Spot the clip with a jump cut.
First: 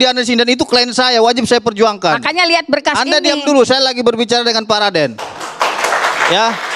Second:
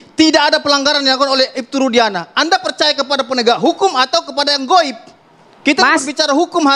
second; 1 cut; at 2.9 s

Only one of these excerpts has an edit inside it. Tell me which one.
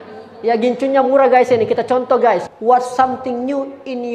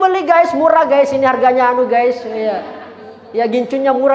first; 1 cut; at 2.5 s

